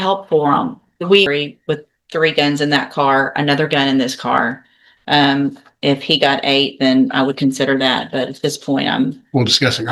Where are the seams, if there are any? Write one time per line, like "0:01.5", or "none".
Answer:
0:01.3